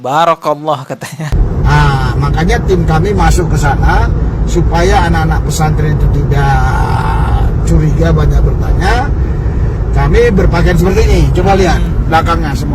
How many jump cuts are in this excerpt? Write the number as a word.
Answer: one